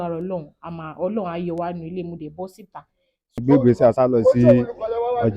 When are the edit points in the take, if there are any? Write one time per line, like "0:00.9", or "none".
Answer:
0:03.4

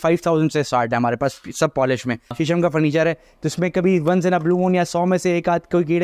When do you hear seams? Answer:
0:02.2

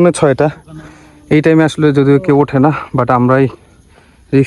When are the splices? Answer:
none

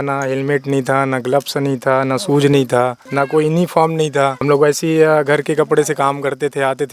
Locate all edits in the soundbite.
0:03.0
0:04.4

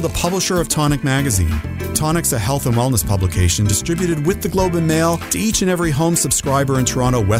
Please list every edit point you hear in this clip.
0:02.0

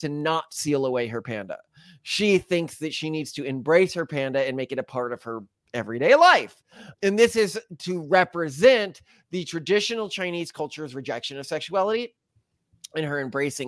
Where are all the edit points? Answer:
none

